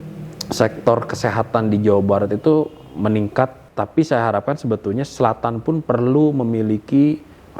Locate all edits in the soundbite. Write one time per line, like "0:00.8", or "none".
0:03.7